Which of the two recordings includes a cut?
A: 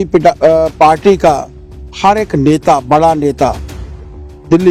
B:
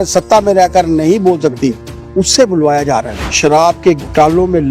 B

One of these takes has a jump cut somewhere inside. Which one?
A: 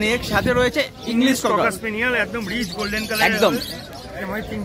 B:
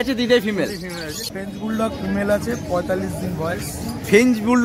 B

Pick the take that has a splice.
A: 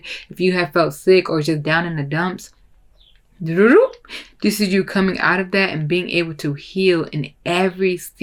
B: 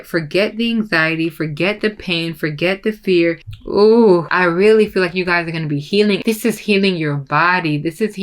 B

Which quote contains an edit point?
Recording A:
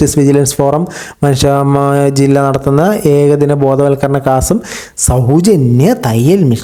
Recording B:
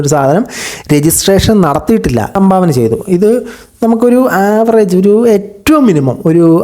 B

